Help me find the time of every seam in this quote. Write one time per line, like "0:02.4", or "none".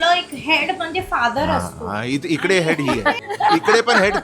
0:03.2